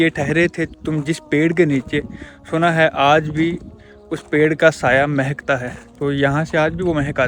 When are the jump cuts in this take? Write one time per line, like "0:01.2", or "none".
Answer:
none